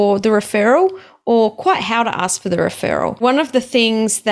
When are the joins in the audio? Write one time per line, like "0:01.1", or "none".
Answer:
0:03.2